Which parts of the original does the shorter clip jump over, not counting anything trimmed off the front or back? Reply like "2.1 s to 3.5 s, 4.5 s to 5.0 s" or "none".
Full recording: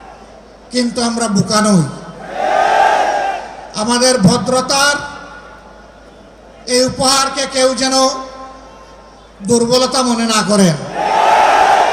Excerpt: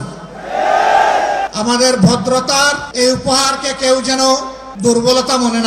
3.4 s to 3.7 s, 5.1 s to 6.6 s, 8.3 s to 9.3 s

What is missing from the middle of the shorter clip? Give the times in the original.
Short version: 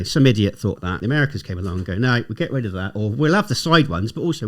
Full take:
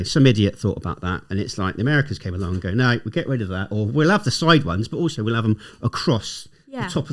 1.0 s to 1.7 s

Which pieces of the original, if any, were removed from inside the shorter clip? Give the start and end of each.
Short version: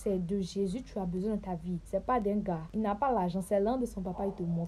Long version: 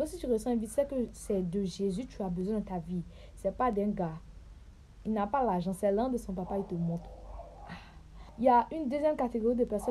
3.1 s to 3.3 s, 4.2 s to 5.0 s

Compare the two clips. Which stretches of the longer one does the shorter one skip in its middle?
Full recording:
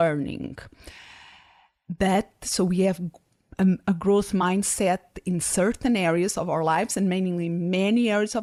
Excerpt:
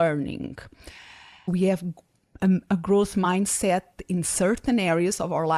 1.5 s to 2.7 s

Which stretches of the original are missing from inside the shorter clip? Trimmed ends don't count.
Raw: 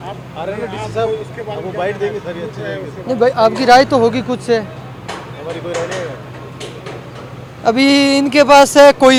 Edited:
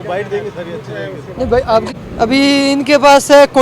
3.6 s to 7.3 s

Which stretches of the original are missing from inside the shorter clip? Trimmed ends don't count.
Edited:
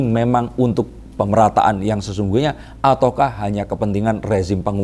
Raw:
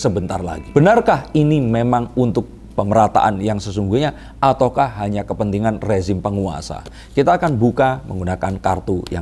none

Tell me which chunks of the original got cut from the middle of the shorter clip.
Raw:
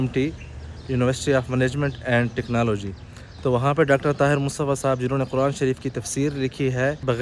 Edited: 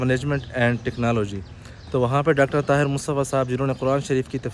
none

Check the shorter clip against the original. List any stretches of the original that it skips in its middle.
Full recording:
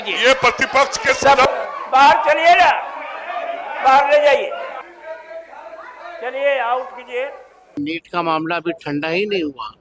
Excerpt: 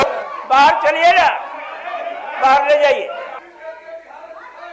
none

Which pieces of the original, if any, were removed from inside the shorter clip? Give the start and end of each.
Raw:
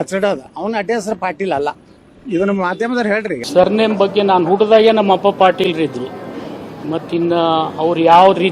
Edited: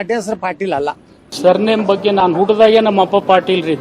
2.1 s to 3.4 s

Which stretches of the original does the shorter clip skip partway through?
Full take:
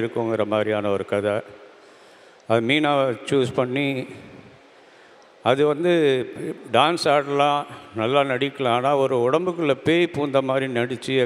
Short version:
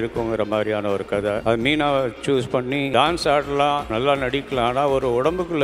1.4 s to 2.4 s, 3.9 s to 6.7 s, 7.7 s to 7.9 s

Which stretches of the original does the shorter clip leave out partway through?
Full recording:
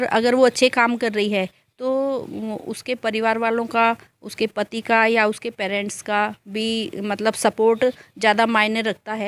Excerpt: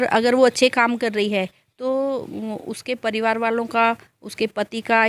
none

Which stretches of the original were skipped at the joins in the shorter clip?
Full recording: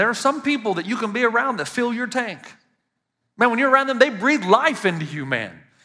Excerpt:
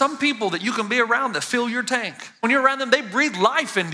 2.7 s to 3.5 s

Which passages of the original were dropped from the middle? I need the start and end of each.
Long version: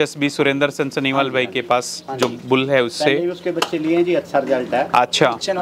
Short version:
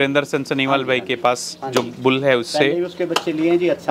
none

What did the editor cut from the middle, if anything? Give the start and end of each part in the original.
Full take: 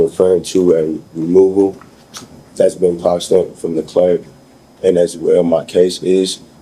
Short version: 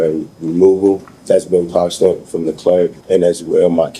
1.8 s to 2.4 s, 4.3 s to 4.7 s

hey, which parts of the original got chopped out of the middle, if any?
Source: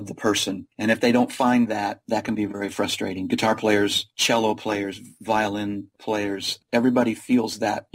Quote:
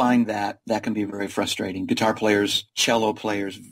none

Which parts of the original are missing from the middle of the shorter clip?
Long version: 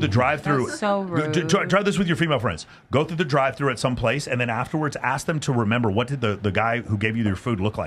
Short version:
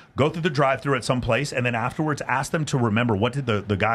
none

